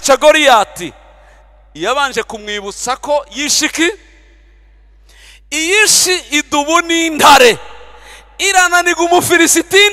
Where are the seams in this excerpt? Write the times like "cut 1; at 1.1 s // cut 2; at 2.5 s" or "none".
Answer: none